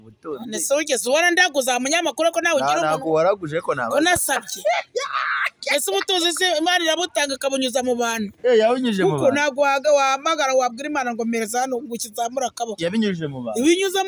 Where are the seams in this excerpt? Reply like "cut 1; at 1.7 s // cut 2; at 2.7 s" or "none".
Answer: none